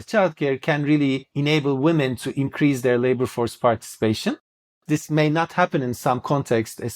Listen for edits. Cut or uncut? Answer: cut